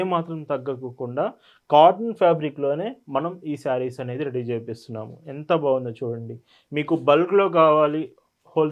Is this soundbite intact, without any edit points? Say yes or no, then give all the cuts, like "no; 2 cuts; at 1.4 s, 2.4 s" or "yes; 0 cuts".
yes; 0 cuts